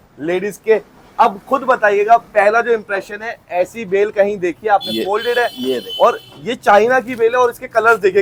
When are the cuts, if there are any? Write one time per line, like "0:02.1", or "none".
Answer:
none